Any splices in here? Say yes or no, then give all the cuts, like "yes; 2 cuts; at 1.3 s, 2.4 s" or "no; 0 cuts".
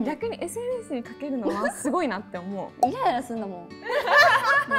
no; 0 cuts